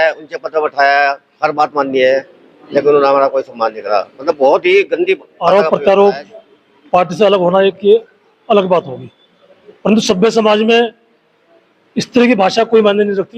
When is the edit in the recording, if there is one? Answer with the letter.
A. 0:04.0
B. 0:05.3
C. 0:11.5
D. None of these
B